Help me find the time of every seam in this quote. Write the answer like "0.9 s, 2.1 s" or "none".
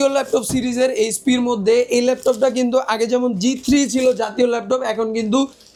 none